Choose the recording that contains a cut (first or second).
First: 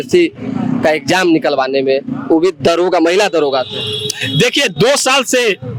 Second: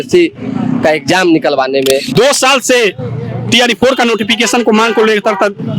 second